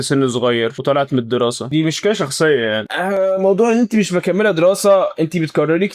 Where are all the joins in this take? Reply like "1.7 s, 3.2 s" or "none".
2.9 s